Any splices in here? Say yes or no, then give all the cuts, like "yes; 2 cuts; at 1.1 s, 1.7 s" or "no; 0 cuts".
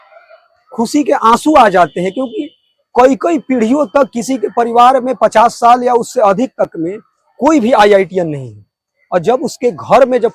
no; 0 cuts